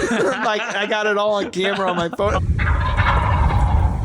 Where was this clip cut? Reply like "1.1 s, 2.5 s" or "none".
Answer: 2.4 s